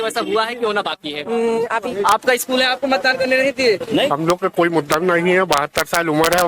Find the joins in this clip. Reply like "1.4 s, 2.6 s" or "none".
1.9 s, 4.1 s